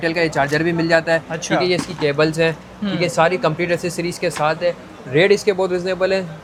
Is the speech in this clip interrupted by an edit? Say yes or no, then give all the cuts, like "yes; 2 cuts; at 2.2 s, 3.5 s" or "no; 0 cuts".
no; 0 cuts